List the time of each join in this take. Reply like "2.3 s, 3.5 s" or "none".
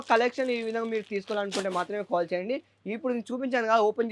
none